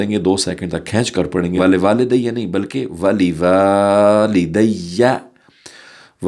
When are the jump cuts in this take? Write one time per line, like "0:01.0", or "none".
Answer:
0:01.6